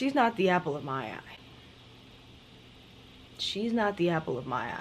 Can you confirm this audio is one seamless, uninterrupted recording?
yes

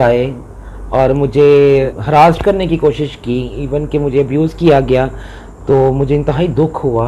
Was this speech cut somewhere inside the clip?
no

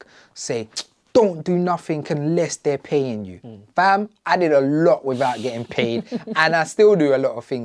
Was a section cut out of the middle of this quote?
no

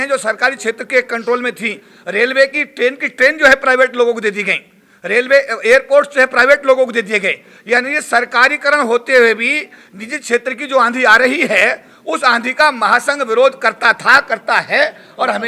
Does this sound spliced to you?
no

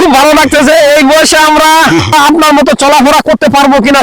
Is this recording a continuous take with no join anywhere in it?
no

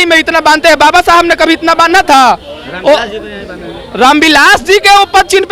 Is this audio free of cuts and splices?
yes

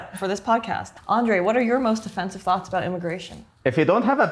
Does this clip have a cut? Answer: yes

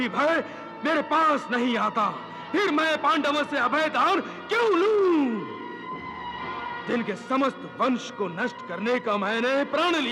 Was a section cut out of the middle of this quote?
yes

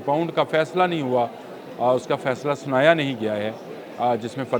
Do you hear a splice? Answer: no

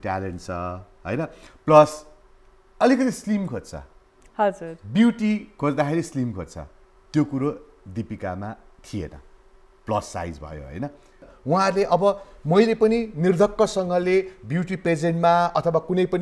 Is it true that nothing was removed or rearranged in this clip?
no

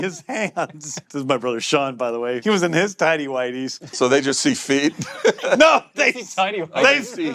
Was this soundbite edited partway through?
yes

